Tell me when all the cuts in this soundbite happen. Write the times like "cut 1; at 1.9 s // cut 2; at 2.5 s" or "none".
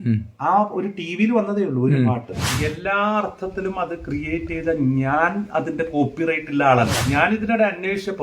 cut 1; at 2.5 s // cut 2; at 7.0 s